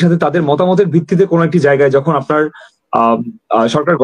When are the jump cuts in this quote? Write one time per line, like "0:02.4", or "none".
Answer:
none

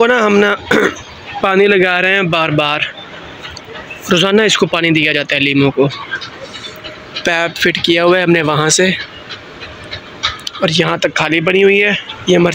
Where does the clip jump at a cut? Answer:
none

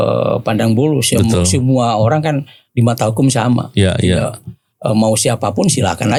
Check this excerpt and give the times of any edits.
none

